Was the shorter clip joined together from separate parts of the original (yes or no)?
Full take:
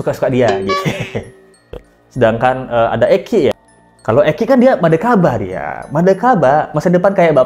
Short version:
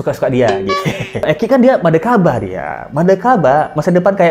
yes